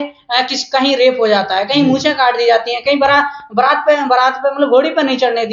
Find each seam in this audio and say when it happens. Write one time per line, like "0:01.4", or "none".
none